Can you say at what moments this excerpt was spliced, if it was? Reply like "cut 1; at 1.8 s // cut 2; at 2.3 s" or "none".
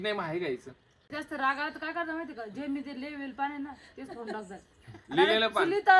cut 1; at 1.1 s